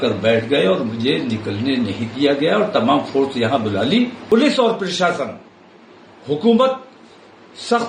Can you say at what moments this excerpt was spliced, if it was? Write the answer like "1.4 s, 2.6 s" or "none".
4.2 s